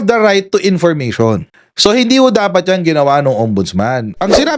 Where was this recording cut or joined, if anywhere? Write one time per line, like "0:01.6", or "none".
none

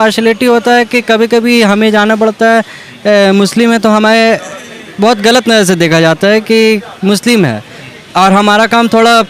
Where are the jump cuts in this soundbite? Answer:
none

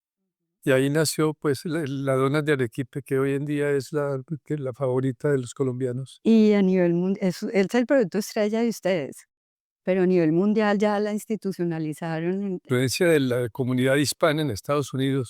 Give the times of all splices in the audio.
0:12.6

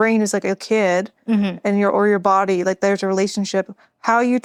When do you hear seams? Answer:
none

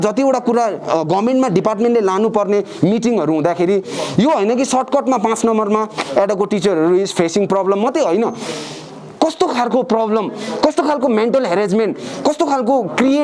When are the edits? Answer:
none

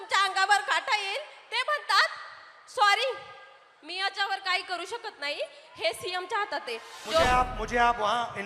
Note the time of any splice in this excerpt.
0:07.0

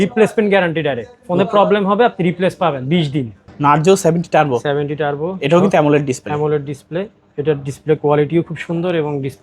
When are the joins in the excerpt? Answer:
0:03.5

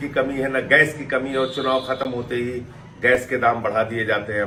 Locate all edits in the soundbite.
none

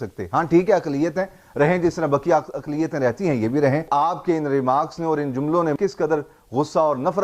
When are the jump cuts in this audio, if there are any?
0:03.8
0:05.8

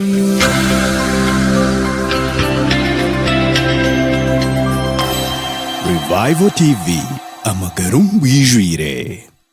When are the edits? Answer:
none

